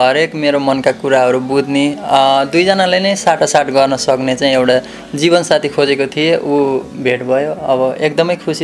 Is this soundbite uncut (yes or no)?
yes